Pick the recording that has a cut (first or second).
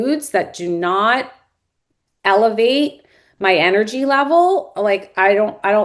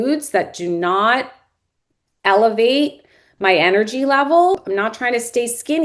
second